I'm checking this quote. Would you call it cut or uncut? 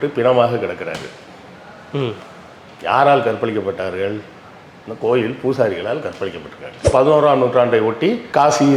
cut